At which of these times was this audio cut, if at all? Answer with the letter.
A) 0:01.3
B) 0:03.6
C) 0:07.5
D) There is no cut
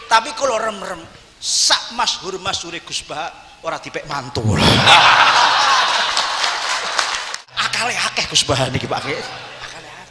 C